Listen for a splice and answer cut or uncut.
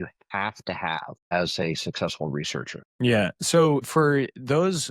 cut